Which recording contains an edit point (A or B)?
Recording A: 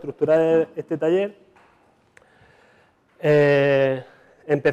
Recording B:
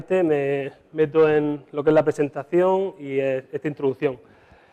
B